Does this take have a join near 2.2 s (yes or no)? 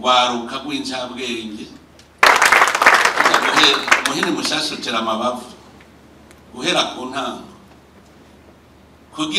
yes